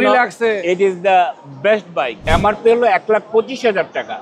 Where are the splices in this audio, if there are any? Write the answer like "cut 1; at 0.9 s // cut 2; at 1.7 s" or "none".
cut 1; at 2.2 s